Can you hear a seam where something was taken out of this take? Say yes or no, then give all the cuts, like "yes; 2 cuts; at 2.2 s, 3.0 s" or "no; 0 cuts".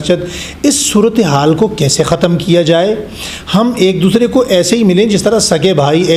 no; 0 cuts